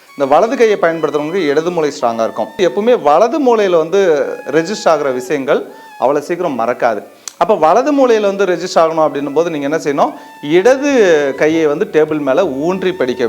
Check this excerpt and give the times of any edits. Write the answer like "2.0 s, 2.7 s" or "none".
2.6 s